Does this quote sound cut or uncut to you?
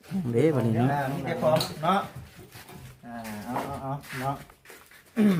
uncut